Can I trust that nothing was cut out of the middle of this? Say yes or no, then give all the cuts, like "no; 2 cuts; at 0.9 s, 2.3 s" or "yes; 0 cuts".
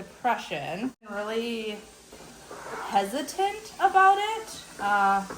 no; 1 cut; at 1.1 s